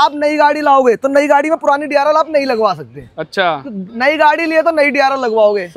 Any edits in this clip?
no; 0 cuts

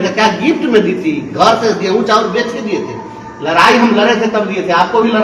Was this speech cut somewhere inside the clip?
no; 0 cuts

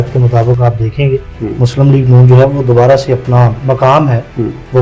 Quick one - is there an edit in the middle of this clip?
yes; 2 cuts; at 1.3 s, 3.6 s

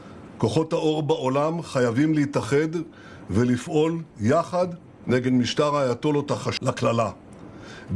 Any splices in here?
yes; 1 cut; at 6.5 s

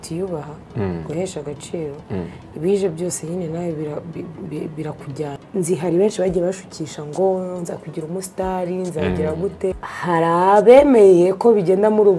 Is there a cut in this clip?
yes; 2 cuts; at 5.4 s, 9.8 s

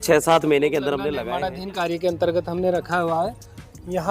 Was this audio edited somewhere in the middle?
yes; 1 cut; at 1.2 s

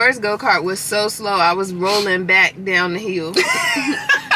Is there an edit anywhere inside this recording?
no; 0 cuts

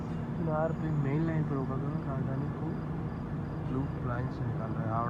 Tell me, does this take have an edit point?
no; 0 cuts

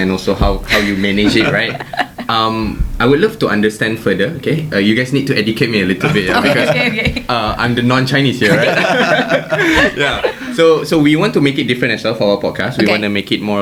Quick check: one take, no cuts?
yes; 0 cuts

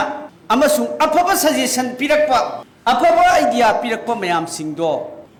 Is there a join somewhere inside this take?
no; 0 cuts

